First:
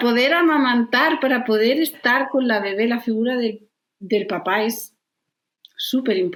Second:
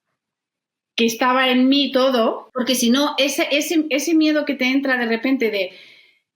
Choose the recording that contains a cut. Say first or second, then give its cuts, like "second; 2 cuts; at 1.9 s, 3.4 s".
second; 1 cut; at 2.4 s